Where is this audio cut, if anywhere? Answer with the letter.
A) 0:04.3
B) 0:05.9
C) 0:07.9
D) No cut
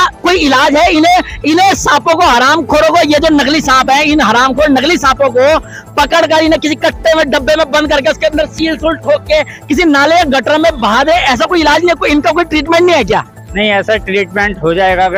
D